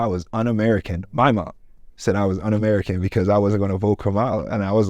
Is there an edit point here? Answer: no; 0 cuts

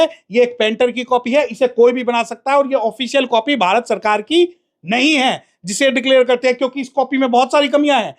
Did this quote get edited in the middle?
no; 0 cuts

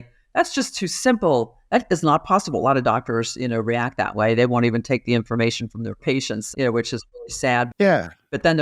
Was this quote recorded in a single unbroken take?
yes; 0 cuts

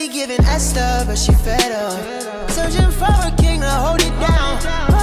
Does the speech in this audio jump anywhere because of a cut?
no; 0 cuts

